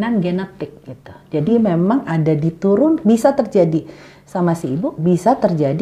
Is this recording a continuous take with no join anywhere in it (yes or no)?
yes